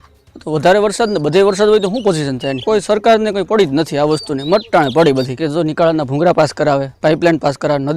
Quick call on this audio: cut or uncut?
cut